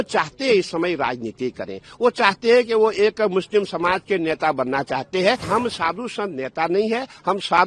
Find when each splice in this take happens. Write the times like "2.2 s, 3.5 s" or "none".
5.4 s